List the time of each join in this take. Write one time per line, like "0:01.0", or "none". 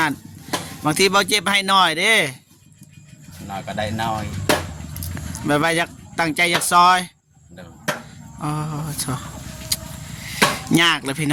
none